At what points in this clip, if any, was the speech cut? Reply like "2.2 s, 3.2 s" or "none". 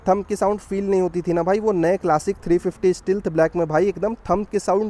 none